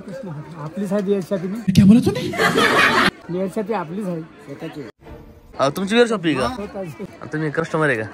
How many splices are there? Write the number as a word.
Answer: three